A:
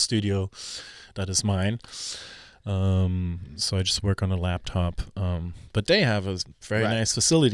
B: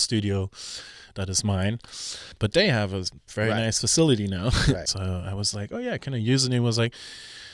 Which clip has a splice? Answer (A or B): B